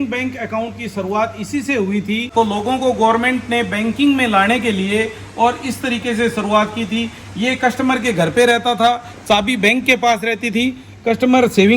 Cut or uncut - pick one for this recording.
cut